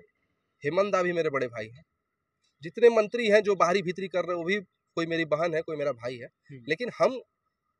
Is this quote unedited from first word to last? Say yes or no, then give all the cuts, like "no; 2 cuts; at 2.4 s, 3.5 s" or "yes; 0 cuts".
yes; 0 cuts